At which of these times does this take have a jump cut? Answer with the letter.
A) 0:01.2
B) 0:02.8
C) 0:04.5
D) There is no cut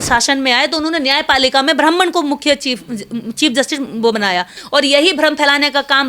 C